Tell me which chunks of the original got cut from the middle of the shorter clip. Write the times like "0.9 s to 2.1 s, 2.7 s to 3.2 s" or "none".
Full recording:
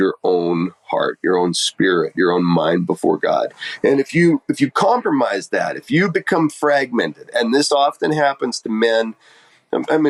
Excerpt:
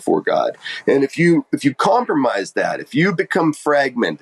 none